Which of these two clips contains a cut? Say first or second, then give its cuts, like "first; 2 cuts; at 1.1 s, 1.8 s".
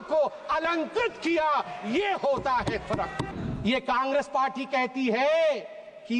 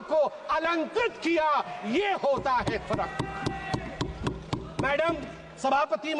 first; 1 cut; at 3.3 s